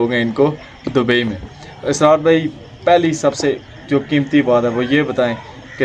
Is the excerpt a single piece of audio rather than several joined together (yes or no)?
yes